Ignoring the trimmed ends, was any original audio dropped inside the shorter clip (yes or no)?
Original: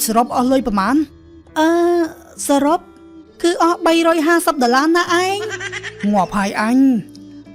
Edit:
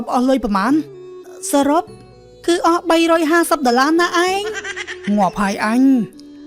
yes